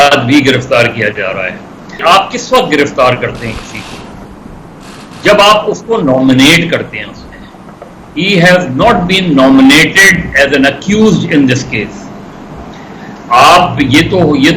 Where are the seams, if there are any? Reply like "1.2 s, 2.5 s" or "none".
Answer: 2.0 s